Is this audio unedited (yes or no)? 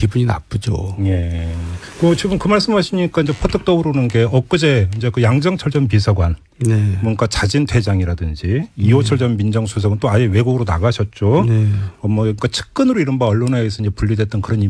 yes